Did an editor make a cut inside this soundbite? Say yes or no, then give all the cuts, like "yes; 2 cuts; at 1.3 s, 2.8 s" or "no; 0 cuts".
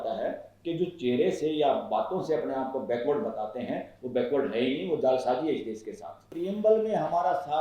yes; 1 cut; at 6.3 s